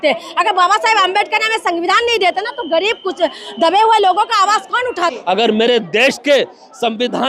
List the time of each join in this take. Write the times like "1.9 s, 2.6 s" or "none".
5.1 s